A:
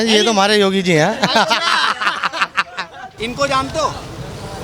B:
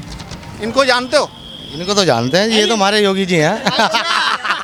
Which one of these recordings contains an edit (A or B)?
A